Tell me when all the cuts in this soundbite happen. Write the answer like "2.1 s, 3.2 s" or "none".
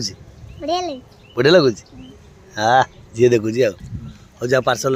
none